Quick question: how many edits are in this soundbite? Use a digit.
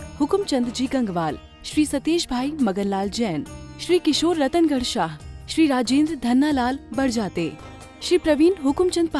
0